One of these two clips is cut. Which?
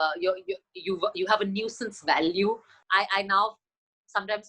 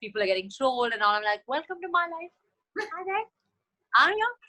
first; 1 cut; at 2.7 s

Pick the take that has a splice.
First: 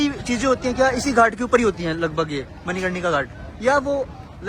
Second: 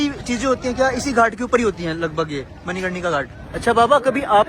second; 1 cut; at 3.4 s

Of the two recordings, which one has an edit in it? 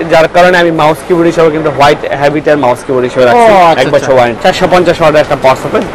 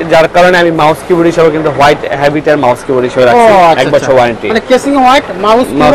first; 1 cut; at 4.3 s

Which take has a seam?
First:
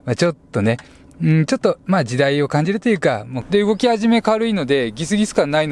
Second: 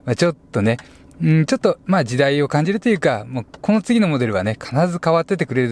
first; 1 cut; at 3.3 s

